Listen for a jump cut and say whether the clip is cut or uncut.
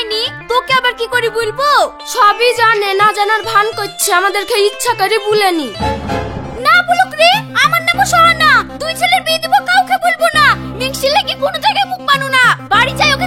uncut